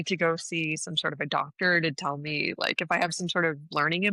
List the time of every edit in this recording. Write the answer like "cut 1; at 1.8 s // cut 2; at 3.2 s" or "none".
none